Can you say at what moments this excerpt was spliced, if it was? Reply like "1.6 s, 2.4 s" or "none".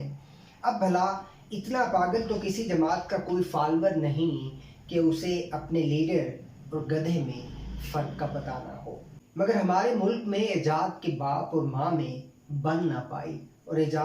9.1 s